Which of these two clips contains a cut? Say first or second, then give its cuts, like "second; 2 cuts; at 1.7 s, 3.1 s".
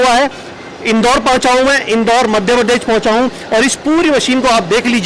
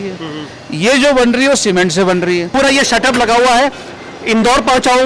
second; 1 cut; at 2.5 s